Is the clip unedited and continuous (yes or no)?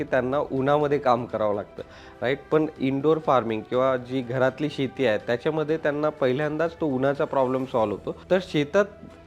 no